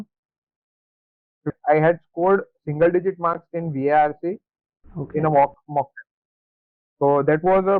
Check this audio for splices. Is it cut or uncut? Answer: uncut